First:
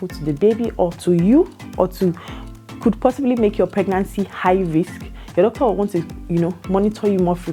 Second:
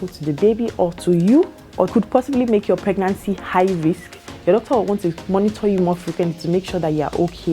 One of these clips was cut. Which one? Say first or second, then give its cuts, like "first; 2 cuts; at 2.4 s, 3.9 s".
second; 2 cuts; at 1.9 s, 5.2 s